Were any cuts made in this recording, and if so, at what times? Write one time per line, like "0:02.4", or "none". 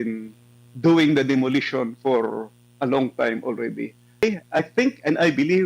0:04.2